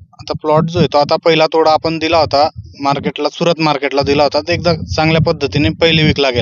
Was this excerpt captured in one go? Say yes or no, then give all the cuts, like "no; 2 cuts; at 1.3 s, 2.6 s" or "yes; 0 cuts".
yes; 0 cuts